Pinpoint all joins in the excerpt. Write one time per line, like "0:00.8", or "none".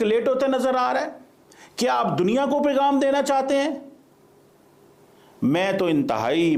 none